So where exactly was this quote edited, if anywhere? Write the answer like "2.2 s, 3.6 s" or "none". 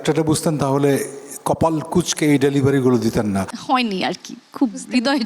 3.5 s